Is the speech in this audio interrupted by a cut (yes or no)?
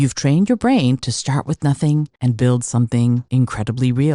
yes